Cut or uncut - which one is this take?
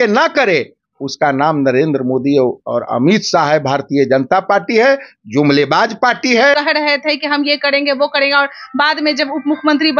cut